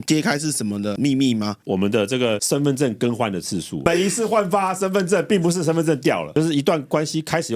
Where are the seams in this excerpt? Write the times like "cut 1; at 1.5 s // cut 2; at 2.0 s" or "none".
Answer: cut 1; at 3.8 s // cut 2; at 6.3 s